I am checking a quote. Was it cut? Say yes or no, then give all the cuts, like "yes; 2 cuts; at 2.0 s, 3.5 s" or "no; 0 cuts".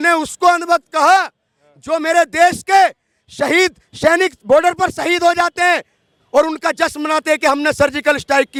no; 0 cuts